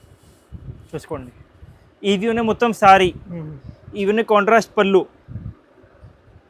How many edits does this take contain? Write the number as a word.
zero